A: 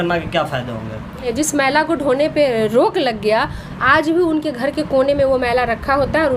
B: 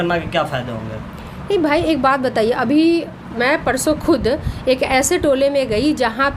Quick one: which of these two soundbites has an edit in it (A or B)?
A